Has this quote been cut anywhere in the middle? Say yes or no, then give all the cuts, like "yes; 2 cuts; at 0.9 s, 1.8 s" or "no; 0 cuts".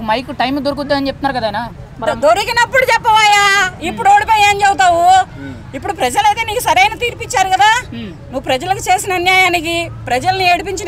no; 0 cuts